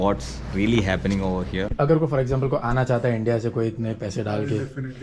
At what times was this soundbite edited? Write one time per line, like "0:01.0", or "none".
0:01.7